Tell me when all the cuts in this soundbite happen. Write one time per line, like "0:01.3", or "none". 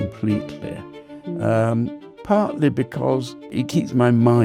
0:03.5